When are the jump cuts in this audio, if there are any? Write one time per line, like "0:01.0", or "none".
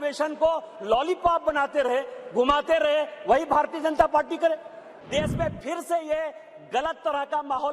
0:04.9